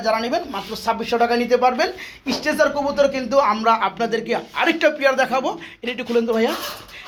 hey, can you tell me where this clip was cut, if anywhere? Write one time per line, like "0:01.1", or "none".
none